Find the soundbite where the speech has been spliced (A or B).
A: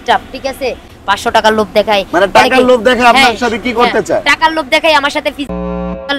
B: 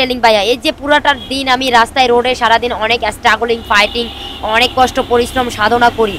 A